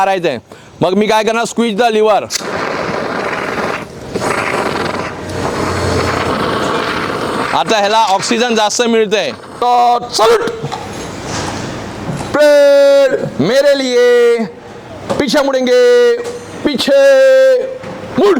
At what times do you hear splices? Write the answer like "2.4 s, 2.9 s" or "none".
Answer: 9.5 s